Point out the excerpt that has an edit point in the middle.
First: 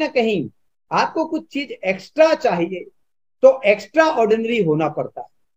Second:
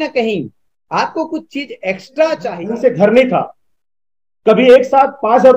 second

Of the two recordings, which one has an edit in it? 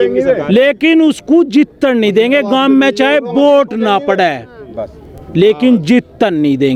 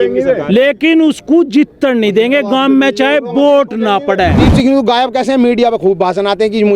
second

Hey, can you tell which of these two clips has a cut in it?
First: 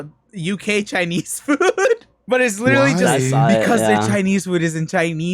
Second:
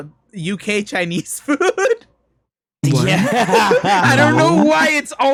first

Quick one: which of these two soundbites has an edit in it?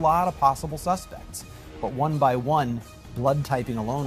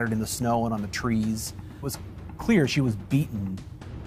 second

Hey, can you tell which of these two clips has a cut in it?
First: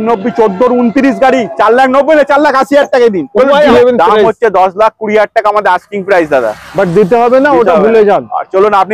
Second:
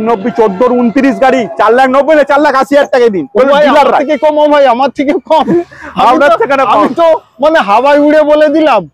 first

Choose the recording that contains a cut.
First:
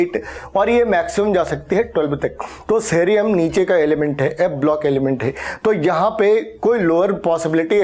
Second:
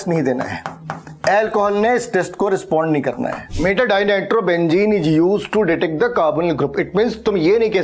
second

